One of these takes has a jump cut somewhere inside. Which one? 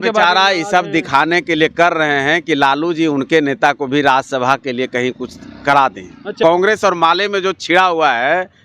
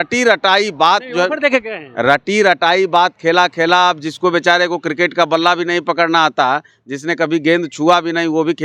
first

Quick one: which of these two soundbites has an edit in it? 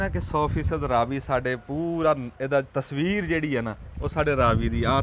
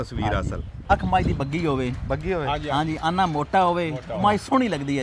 second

